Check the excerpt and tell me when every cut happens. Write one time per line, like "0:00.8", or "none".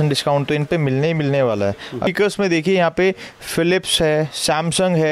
0:02.1